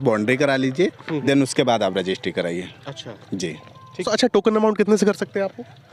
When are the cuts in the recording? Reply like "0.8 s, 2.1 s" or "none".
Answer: none